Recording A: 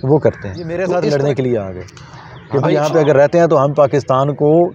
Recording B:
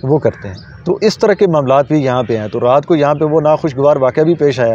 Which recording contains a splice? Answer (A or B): A